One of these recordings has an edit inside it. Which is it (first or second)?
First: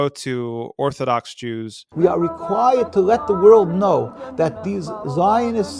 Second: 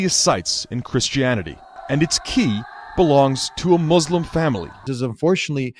second